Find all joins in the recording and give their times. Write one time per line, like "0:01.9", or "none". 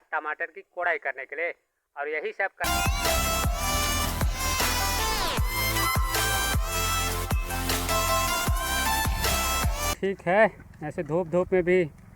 0:02.6
0:06.6
0:09.9